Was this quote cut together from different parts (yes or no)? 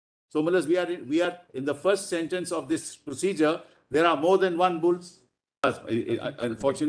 yes